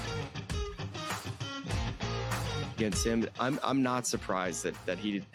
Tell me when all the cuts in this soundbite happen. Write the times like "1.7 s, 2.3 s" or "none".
none